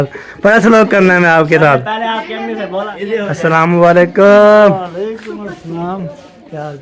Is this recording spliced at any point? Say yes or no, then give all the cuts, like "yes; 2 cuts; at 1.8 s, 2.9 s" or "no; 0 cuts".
yes; 1 cut; at 2.9 s